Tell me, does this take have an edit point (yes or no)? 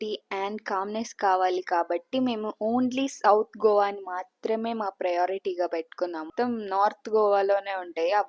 yes